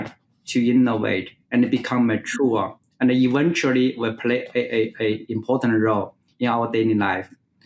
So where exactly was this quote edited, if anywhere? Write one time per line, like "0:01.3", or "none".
none